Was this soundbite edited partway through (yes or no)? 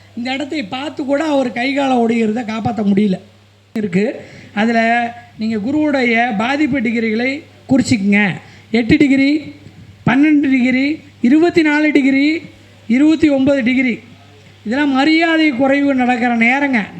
yes